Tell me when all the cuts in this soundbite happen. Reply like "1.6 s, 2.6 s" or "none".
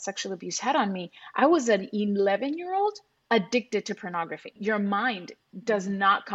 4.6 s